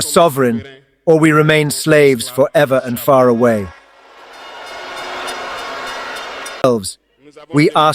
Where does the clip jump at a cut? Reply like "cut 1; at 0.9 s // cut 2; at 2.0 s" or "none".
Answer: cut 1; at 6.6 s